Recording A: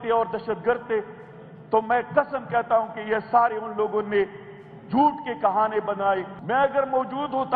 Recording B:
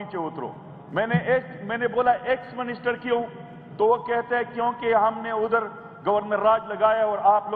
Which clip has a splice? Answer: A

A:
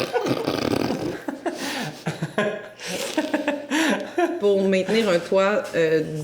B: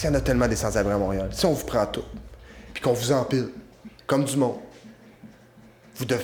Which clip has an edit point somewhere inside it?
A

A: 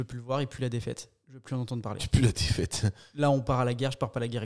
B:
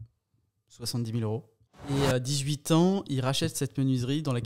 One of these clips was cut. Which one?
B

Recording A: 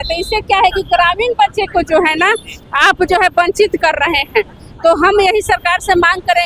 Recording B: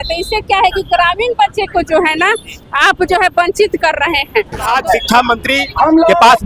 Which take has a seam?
B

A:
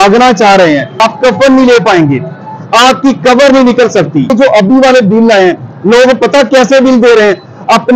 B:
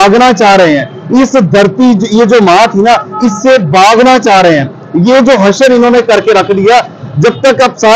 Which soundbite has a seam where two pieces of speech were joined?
A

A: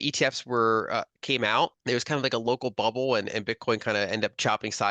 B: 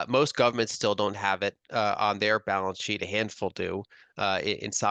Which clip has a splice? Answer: A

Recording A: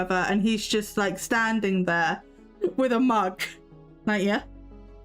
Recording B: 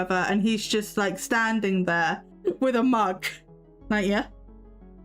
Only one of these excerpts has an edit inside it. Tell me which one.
B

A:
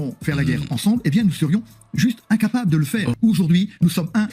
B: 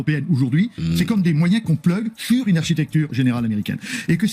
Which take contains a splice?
A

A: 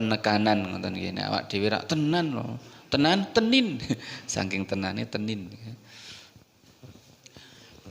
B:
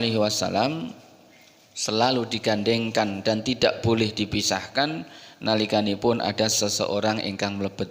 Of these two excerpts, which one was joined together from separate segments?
A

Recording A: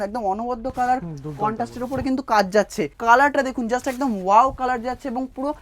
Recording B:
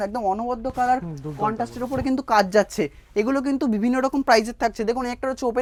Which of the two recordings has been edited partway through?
A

